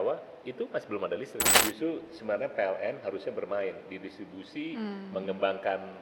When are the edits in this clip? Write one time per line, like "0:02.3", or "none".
0:01.4